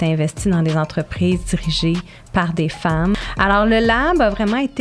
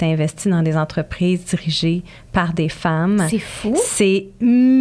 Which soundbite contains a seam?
first; 1 cut; at 3.1 s

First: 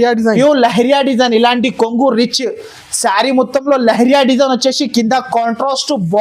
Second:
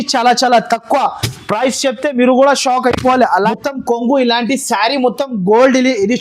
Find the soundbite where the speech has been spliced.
second; 1 cut; at 3.5 s

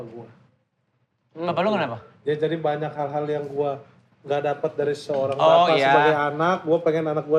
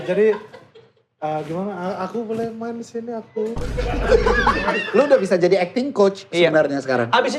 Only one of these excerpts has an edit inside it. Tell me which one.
second; 1 cut; at 4.8 s

